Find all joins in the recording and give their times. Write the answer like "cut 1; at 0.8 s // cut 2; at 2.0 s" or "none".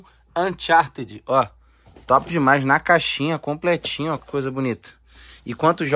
none